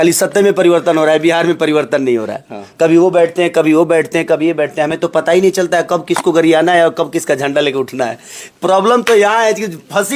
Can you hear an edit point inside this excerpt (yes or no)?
no